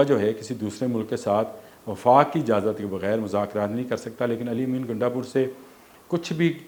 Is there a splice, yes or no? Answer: no